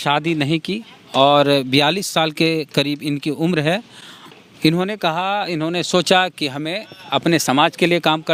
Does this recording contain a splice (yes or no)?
no